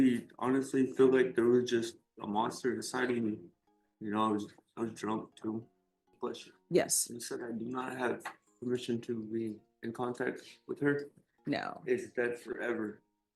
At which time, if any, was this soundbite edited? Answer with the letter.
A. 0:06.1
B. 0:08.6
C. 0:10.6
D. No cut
A